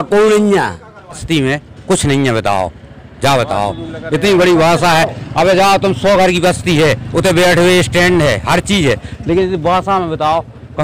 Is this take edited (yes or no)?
yes